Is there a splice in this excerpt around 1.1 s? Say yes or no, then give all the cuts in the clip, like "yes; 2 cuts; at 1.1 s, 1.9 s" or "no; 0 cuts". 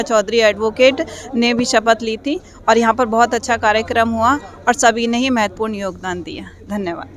no; 0 cuts